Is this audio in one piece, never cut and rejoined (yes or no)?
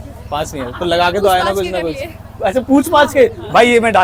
yes